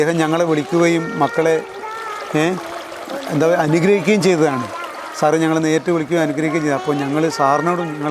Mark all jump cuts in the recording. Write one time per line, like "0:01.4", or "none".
none